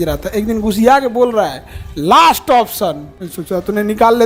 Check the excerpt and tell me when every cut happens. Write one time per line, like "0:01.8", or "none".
none